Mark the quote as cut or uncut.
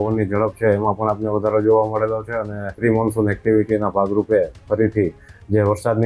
cut